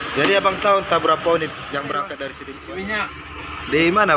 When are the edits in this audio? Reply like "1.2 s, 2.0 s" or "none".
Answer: 2.3 s